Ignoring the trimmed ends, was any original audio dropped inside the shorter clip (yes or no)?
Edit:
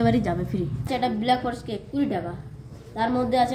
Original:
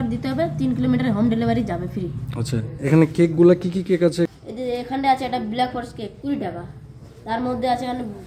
yes